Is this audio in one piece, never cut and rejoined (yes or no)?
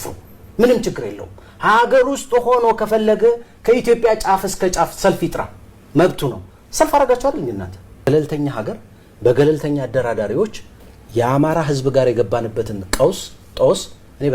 no